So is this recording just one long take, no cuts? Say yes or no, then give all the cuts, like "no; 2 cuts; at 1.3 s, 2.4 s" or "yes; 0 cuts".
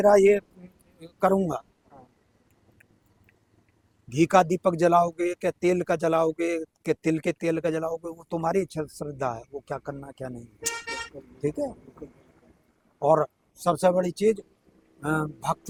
yes; 0 cuts